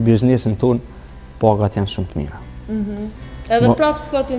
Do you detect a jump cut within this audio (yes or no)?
no